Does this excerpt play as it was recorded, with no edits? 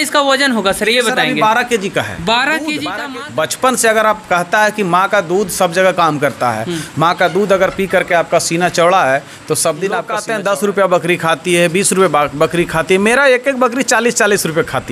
no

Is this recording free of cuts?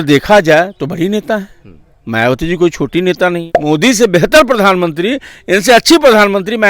no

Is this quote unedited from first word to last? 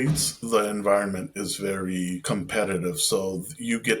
no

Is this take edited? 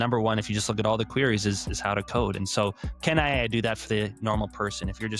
no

